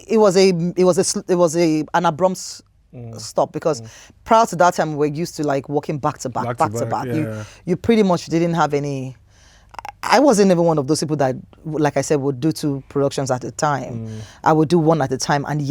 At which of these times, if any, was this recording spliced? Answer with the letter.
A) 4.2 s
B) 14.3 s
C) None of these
C